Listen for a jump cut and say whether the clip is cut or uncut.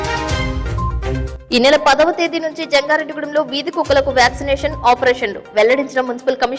cut